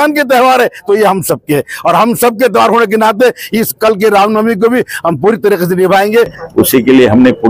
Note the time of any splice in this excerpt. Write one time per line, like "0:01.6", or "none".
0:06.4